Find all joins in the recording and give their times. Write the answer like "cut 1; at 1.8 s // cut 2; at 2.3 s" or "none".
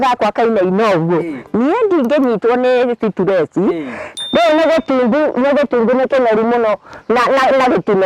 cut 1; at 4.1 s